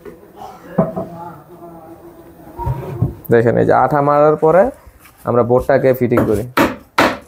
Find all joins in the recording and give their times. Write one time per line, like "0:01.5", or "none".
none